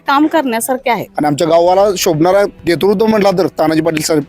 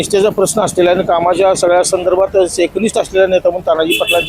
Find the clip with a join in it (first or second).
first